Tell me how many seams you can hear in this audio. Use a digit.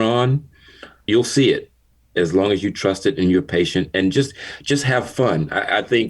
1